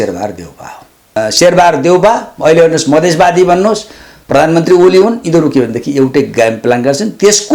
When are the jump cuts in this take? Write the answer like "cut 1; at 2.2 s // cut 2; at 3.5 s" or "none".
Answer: cut 1; at 1.1 s